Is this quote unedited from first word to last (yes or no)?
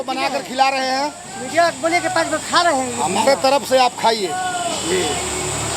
yes